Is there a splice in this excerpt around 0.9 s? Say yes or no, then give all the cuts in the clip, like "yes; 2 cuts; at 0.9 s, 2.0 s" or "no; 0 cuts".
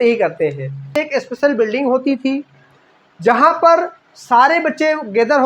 yes; 1 cut; at 0.9 s